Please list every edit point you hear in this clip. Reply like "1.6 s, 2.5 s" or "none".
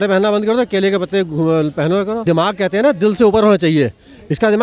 2.2 s